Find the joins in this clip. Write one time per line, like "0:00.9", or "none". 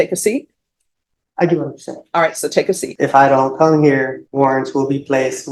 0:02.9
0:04.2